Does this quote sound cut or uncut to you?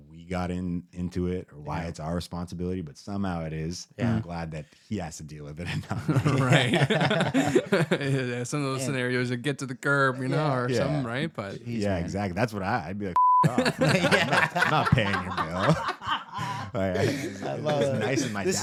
uncut